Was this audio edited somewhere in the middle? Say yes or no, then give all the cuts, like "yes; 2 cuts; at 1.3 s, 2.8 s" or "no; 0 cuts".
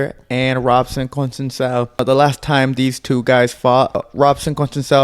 yes; 2 cuts; at 2.0 s, 4.1 s